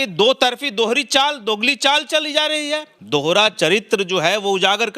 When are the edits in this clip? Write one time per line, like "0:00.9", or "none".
0:02.9